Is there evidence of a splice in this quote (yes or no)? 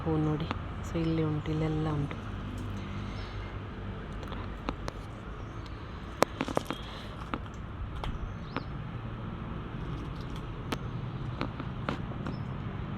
no